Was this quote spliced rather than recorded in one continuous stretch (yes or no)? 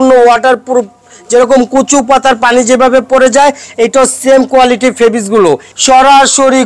yes